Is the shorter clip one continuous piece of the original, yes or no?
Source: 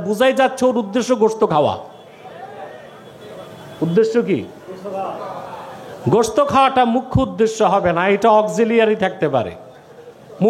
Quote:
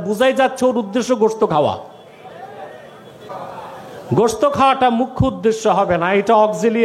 no